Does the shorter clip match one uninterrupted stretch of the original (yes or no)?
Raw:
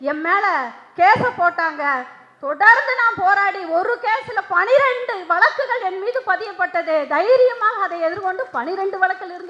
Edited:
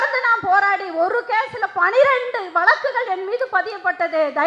yes